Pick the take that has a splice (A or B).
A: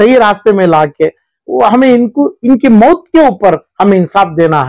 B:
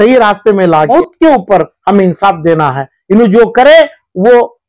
B